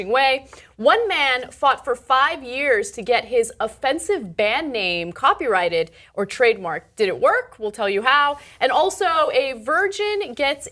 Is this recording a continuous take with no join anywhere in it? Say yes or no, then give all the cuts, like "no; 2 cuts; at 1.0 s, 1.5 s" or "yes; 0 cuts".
no; 1 cut; at 8.9 s